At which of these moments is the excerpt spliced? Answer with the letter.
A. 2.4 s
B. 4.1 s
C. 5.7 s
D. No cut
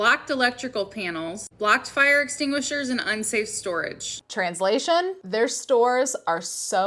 B